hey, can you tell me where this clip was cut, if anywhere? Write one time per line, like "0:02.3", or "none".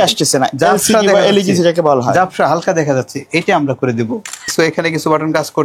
0:04.5